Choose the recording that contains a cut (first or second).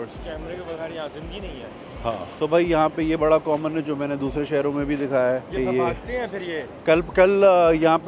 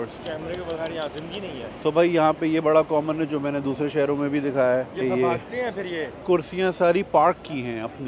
second